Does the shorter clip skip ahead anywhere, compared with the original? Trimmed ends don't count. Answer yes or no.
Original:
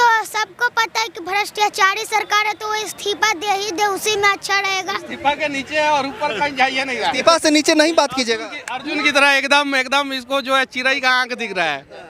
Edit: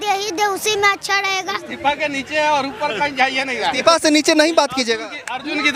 no